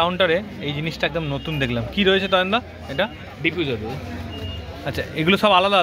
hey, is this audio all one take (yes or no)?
yes